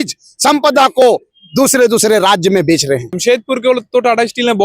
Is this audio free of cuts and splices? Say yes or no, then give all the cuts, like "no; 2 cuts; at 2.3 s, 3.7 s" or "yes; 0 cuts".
no; 1 cut; at 3.1 s